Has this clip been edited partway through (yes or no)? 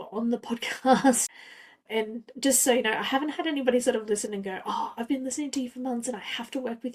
yes